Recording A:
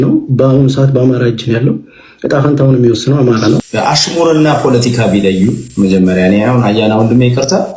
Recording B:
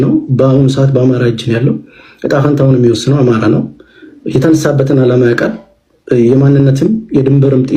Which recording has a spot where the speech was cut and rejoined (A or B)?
A